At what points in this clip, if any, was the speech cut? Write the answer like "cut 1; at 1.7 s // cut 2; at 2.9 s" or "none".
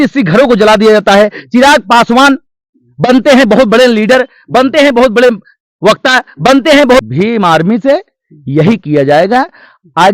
cut 1; at 7.0 s